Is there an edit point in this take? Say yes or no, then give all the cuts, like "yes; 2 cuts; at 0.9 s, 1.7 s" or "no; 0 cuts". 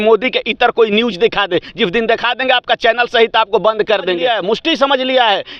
yes; 1 cut; at 4.2 s